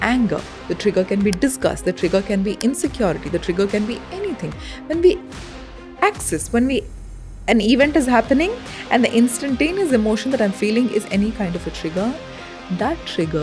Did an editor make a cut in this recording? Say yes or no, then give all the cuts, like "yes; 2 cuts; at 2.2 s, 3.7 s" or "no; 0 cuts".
no; 0 cuts